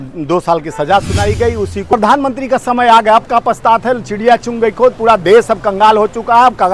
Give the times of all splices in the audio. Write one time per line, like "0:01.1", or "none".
0:01.9